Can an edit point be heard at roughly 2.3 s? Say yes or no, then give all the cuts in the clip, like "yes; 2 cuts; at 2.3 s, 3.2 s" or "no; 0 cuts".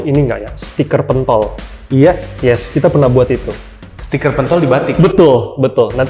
no; 0 cuts